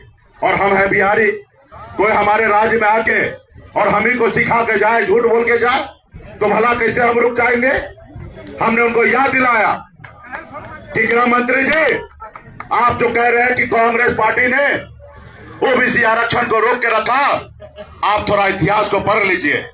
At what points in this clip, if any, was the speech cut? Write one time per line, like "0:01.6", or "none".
none